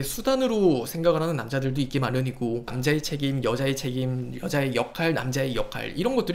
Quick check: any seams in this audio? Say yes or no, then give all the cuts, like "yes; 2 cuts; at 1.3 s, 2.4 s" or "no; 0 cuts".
yes; 1 cut; at 2.7 s